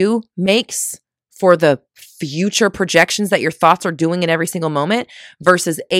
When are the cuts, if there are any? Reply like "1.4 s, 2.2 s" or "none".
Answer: none